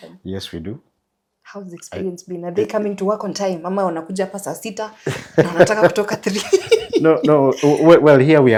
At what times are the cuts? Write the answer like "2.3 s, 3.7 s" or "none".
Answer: none